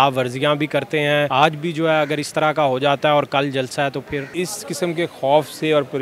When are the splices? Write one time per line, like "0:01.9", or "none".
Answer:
0:01.3
0:04.3